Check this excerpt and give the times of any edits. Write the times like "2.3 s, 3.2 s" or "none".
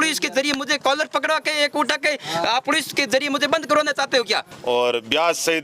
4.5 s

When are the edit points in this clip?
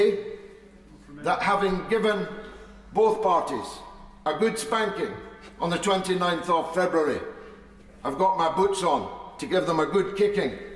none

